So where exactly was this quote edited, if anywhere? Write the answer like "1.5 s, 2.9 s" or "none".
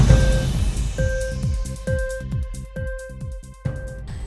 3.3 s